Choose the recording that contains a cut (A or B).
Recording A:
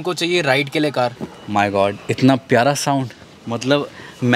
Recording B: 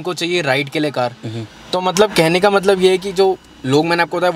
A